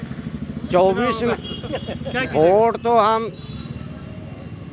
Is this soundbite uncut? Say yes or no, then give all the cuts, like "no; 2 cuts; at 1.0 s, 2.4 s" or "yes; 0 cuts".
yes; 0 cuts